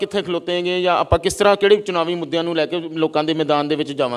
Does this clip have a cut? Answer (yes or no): no